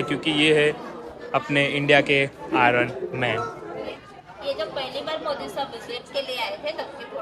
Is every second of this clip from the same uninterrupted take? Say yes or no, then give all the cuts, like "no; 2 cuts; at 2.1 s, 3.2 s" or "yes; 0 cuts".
no; 1 cut; at 4.0 s